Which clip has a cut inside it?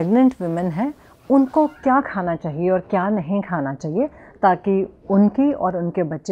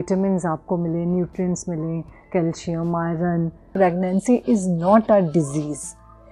second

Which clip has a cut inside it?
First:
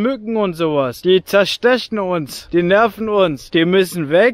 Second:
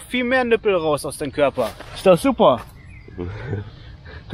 first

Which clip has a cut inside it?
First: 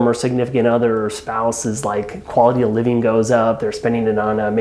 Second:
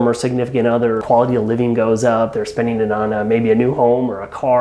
second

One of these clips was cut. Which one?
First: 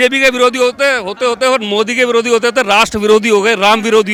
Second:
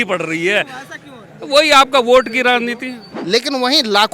second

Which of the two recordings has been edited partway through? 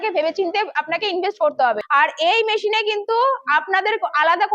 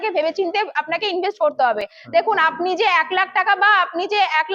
first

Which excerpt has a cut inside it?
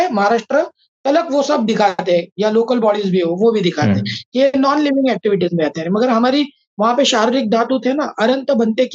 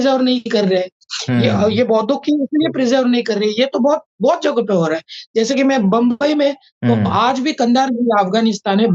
second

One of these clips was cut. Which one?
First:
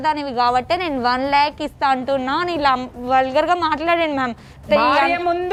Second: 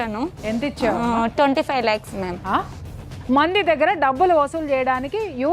second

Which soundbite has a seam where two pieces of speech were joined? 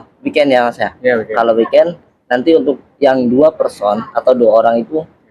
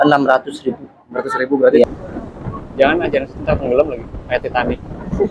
second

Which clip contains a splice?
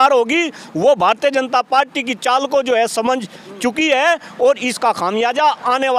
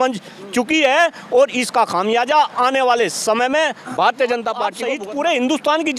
second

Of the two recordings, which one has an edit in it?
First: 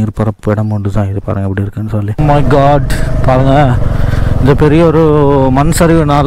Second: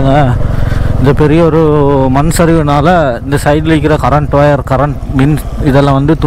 first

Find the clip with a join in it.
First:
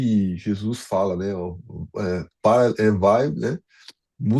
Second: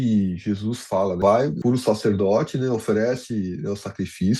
second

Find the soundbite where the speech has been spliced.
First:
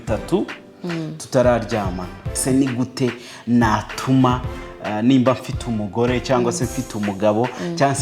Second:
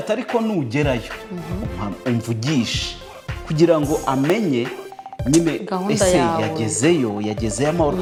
first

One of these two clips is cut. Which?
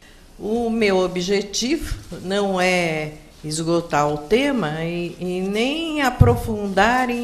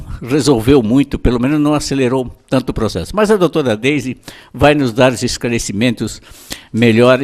second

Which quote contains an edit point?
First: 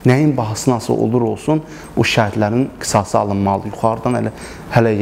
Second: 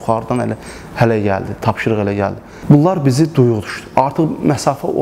second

